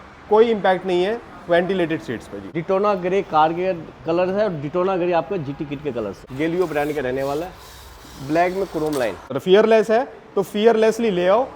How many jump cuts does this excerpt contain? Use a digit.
3